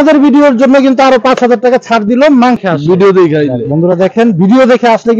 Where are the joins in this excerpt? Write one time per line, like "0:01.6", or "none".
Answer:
0:02.6

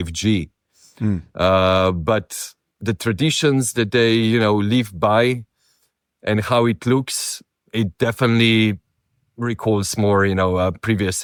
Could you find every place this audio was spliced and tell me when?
none

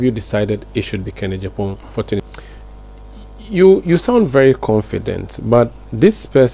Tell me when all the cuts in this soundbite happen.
0:02.3

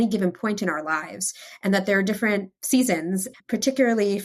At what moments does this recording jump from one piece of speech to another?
0:03.3

